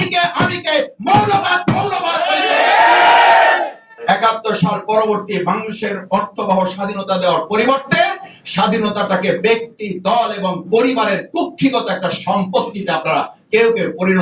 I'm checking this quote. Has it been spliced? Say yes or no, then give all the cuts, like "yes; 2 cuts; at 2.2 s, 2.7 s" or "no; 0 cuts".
yes; 1 cut; at 3.9 s